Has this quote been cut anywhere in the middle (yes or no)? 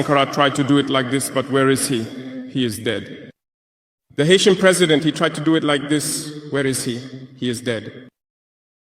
no